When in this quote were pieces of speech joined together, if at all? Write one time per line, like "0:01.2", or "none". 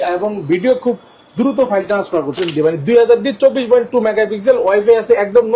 0:02.4